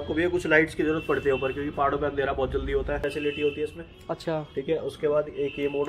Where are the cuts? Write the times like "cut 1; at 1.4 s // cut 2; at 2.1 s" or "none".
cut 1; at 3.0 s